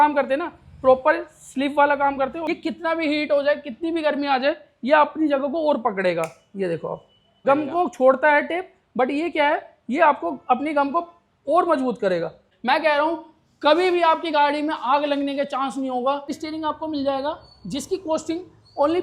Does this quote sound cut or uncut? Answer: cut